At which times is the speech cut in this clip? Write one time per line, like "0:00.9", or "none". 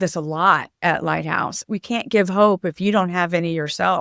0:01.6